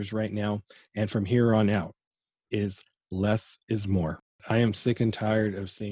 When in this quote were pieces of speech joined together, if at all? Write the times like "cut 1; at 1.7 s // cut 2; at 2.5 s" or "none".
cut 1; at 4.4 s